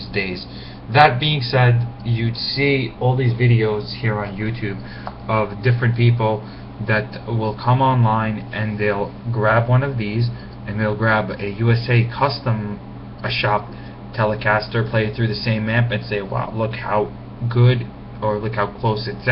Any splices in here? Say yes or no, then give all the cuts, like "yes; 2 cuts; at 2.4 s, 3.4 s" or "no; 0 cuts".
yes; 1 cut; at 9.4 s